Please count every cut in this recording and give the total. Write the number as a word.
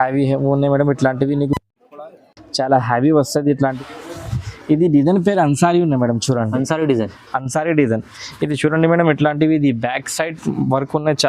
one